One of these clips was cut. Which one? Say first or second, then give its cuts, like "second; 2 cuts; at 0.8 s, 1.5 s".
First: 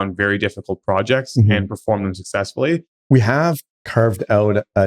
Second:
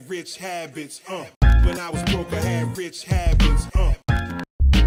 first; 2 cuts; at 2.9 s, 3.7 s